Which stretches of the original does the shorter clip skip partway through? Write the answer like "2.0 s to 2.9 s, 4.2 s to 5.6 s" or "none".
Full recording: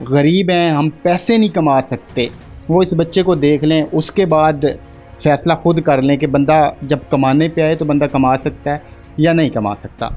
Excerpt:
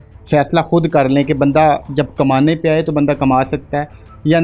none

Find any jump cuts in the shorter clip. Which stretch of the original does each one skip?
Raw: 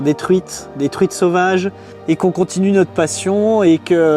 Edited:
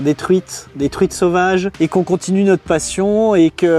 1.7 s to 2.0 s

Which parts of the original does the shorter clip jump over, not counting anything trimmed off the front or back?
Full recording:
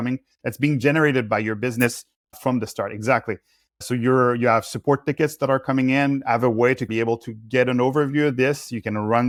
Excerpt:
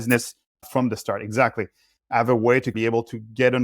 3.8 s to 6.2 s

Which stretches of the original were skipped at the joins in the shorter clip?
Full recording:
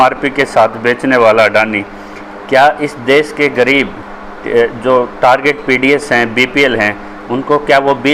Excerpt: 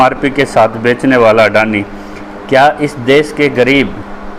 none

